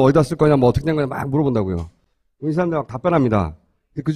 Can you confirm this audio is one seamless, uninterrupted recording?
no; 1 cut; at 2.5 s

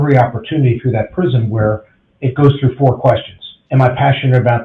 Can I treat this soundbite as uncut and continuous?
no; 1 cut; at 3.6 s

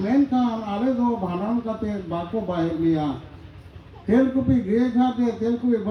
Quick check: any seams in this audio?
no; 0 cuts

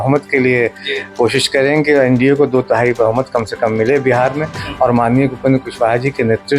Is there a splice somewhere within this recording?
no; 0 cuts

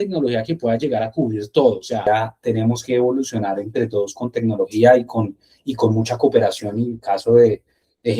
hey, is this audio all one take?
no; 1 cut; at 2.0 s

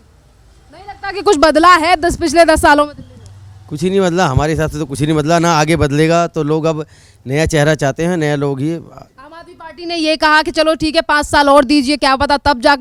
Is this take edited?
no; 0 cuts

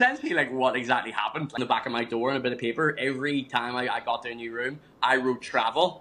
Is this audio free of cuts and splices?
no; 1 cut; at 1.5 s

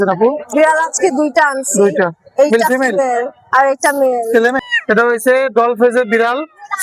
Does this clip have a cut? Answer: yes; 1 cut; at 4.7 s

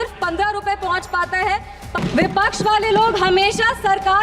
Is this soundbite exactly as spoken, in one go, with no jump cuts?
no; 1 cut; at 1.9 s

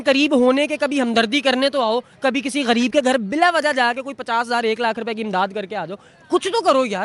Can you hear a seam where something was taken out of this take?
no; 0 cuts

